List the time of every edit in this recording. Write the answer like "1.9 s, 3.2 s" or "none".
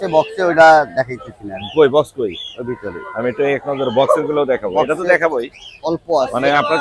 none